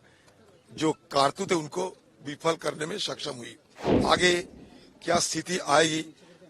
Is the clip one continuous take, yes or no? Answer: no